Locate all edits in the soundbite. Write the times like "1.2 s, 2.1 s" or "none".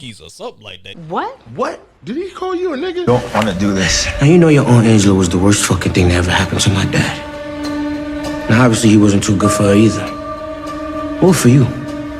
3.1 s